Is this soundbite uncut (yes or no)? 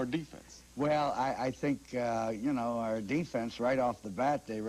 no